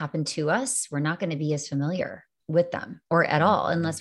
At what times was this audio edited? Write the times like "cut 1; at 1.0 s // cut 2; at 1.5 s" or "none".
none